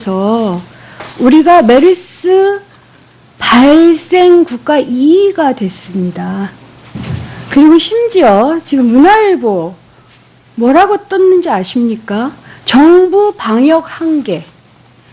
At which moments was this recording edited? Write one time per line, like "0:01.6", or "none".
0:02.7